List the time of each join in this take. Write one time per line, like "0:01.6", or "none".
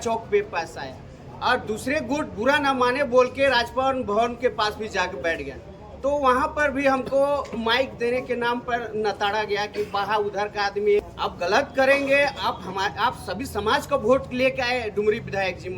0:11.1